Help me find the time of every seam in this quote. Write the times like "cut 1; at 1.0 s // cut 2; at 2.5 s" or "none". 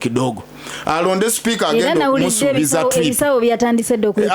none